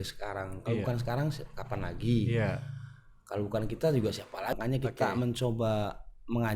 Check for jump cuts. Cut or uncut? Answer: cut